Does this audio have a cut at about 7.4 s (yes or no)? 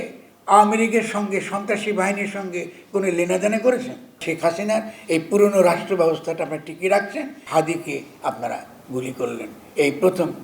yes